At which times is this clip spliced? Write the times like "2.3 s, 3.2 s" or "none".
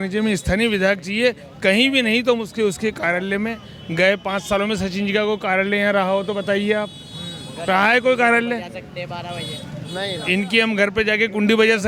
none